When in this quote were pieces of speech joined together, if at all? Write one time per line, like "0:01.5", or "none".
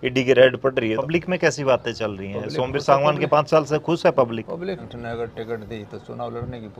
0:01.0
0:04.8